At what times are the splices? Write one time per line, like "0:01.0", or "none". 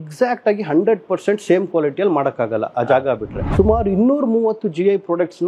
0:03.3